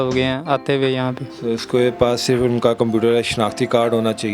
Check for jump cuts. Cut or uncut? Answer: cut